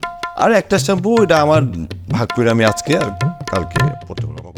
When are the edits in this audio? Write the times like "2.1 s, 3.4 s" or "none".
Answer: none